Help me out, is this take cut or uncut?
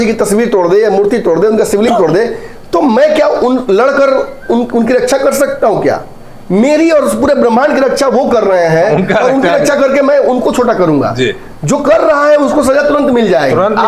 uncut